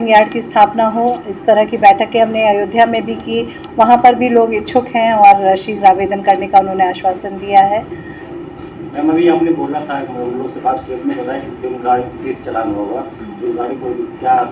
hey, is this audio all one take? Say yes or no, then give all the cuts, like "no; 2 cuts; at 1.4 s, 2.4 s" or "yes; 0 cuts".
yes; 0 cuts